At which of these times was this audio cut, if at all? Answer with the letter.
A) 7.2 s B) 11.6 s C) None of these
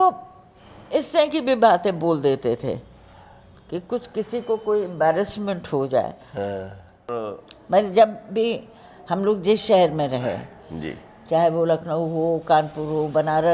A